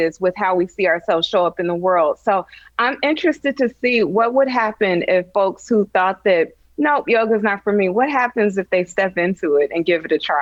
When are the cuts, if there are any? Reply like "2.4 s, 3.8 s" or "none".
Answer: none